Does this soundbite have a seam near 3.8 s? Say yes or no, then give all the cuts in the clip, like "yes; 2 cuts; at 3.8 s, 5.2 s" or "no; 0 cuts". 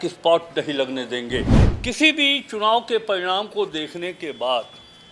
no; 1 cut; at 1.6 s